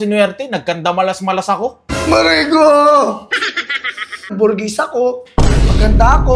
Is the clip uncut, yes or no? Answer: no